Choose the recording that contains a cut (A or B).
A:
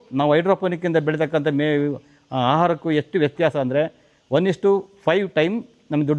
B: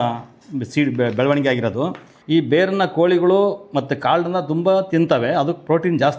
B